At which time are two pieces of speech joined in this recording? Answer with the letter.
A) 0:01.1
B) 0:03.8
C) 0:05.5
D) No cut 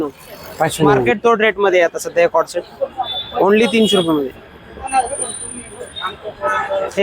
A